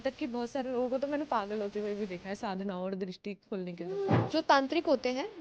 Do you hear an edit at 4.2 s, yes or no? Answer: yes